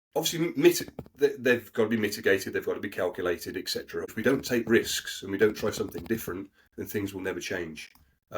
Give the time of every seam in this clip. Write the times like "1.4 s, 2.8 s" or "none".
4.1 s